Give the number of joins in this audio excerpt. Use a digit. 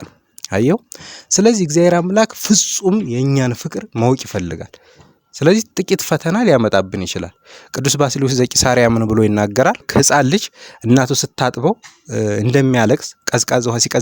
1